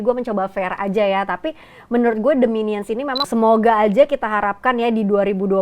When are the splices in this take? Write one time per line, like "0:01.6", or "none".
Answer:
0:03.3